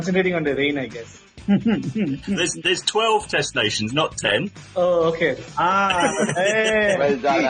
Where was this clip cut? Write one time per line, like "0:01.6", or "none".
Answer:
none

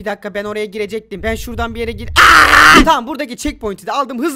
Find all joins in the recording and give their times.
0:02.8

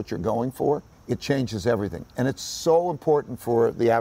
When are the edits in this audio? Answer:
none

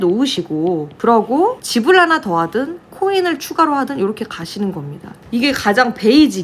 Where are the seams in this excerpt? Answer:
0:00.9
0:01.6
0:05.2

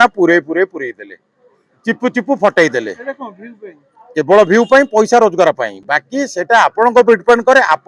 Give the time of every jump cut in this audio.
none

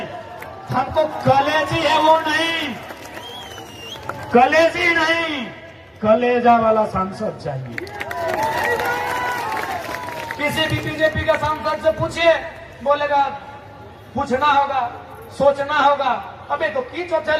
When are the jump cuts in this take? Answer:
none

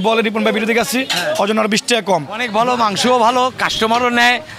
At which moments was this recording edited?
0:02.4

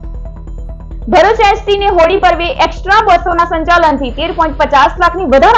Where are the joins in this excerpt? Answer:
none

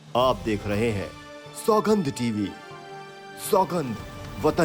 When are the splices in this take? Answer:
none

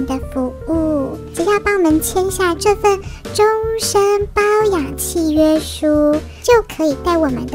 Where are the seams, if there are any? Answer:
none

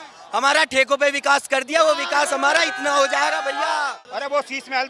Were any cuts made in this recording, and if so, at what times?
0:03.9

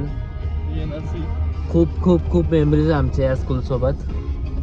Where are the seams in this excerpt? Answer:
none

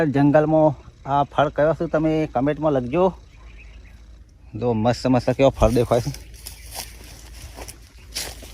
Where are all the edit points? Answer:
none

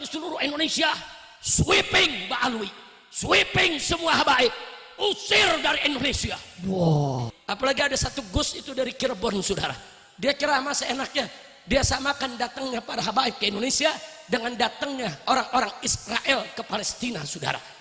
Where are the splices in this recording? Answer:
0:07.3

